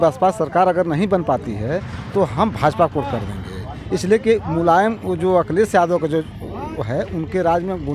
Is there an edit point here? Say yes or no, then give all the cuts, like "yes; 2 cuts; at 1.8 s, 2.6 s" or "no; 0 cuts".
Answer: no; 0 cuts